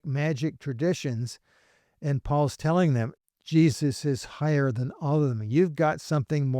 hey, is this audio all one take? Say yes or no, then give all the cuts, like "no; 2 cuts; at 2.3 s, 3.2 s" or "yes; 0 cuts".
no; 1 cut; at 3.2 s